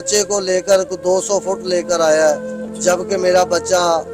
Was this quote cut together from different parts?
no; 0 cuts

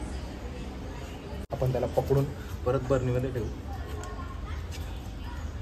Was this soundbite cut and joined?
yes; 1 cut; at 1.5 s

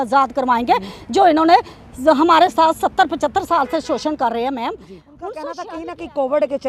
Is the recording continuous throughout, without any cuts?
no; 1 cut; at 5.3 s

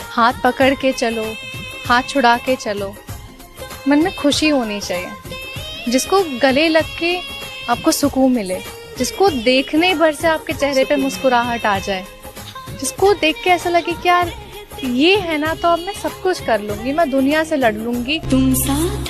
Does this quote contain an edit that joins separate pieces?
no; 0 cuts

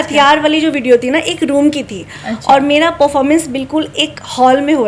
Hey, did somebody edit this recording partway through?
no; 0 cuts

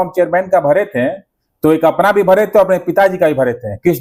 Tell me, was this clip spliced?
no; 0 cuts

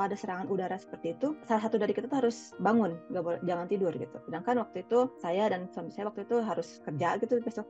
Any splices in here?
no; 0 cuts

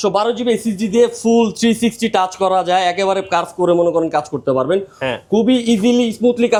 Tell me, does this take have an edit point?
no; 0 cuts

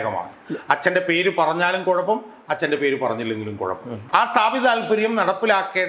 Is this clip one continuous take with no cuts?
no; 1 cut; at 3.9 s

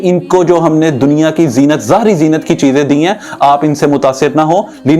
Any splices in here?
no; 0 cuts

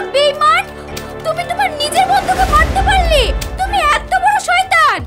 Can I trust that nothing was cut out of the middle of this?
yes; 0 cuts

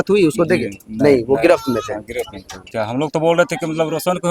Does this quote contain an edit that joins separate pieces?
yes; 1 cut; at 2.6 s

